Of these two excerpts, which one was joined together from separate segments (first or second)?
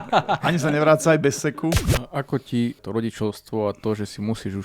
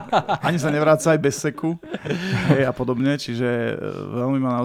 first